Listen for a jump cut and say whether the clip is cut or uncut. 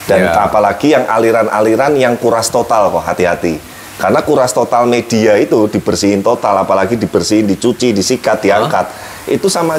uncut